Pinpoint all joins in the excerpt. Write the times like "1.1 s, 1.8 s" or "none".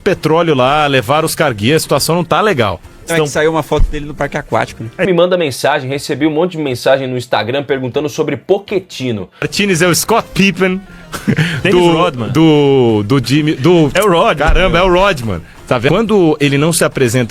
5.1 s, 9.5 s, 15.9 s